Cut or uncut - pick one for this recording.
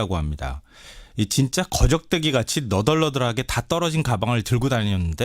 cut